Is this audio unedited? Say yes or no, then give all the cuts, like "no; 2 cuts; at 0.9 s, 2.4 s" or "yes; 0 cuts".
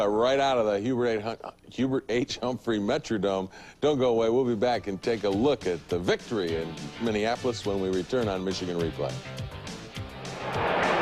yes; 0 cuts